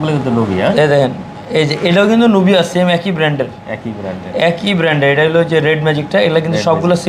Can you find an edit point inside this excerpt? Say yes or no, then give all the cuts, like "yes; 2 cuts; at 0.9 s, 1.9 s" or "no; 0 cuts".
no; 0 cuts